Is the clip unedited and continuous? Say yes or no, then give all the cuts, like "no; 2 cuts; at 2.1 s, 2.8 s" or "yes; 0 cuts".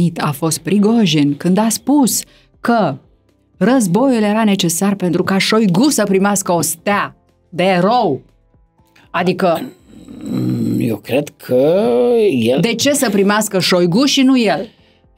yes; 0 cuts